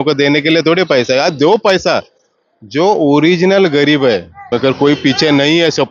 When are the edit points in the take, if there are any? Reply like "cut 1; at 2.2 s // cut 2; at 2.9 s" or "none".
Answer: cut 1; at 4.5 s